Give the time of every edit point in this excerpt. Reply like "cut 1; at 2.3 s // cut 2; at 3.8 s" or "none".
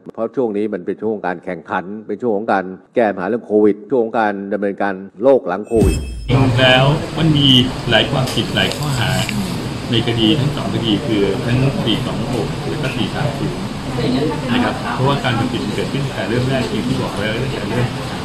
cut 1; at 6.3 s

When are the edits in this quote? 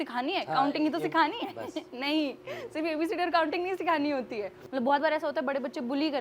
cut 1; at 4.6 s

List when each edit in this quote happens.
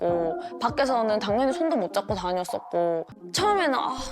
cut 1; at 3.1 s

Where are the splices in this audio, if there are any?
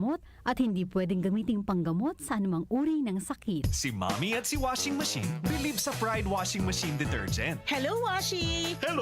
cut 1; at 3.6 s

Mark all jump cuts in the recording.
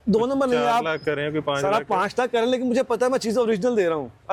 none

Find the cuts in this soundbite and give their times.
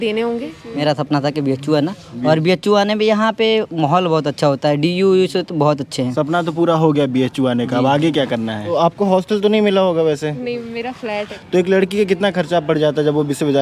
cut 1; at 0.8 s // cut 2; at 8.7 s // cut 3; at 11.3 s

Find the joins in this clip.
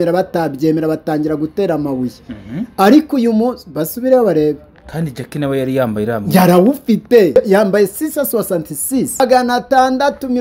cut 1; at 7.4 s // cut 2; at 9.2 s

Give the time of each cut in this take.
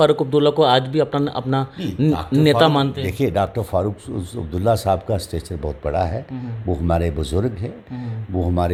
none

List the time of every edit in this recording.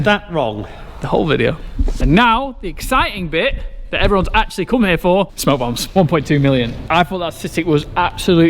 cut 1; at 2.0 s // cut 2; at 5.8 s // cut 3; at 6.8 s

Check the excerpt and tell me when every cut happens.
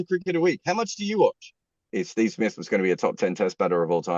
cut 1; at 1.9 s

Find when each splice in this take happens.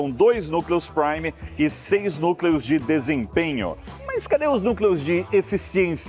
none

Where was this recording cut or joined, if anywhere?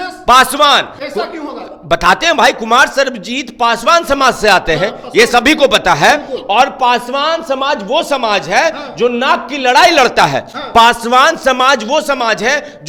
none

